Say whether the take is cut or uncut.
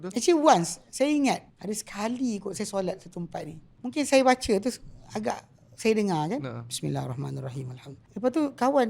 cut